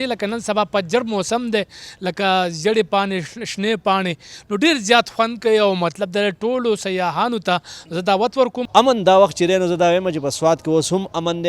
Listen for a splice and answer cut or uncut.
cut